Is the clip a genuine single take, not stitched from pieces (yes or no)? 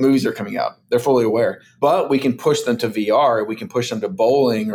no